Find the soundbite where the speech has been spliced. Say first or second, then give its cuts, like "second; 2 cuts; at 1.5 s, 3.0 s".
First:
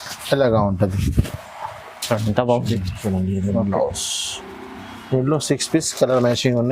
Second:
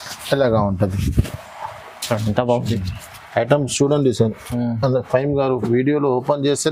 first; 1 cut; at 3.0 s